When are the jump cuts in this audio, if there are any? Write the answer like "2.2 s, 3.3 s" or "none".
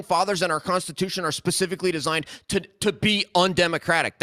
none